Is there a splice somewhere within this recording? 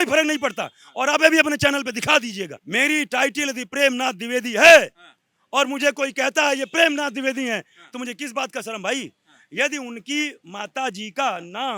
no; 0 cuts

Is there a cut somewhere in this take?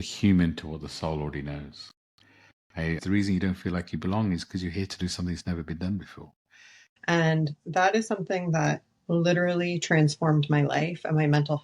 yes; 2 cuts; at 3.0 s, 6.8 s

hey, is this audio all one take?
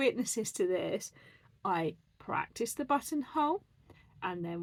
yes; 0 cuts

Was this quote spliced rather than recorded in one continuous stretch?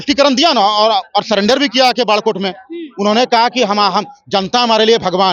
no; 0 cuts

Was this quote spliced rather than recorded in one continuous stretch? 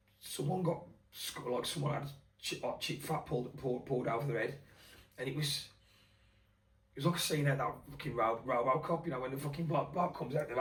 no; 0 cuts

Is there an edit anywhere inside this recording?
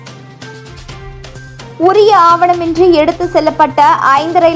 yes; 1 cut; at 1.5 s

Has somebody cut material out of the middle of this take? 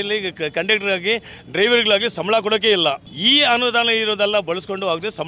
no; 0 cuts

